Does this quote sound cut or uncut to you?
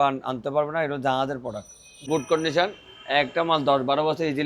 cut